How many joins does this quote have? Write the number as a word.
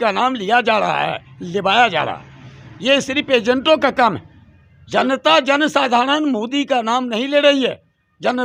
zero